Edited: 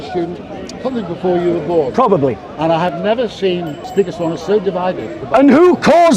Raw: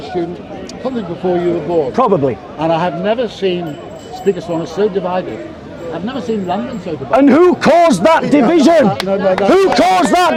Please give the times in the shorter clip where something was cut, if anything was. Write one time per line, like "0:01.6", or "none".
0:03.8
0:05.2